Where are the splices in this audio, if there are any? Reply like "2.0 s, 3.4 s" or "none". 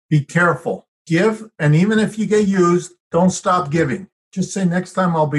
0.9 s, 4.2 s